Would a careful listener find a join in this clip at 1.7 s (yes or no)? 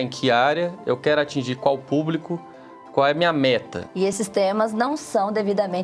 no